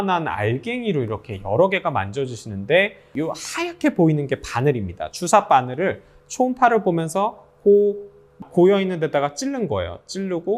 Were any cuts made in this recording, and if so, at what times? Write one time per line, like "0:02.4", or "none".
0:03.1
0:08.4